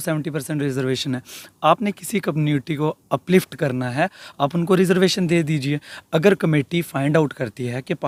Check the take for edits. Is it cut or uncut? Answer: uncut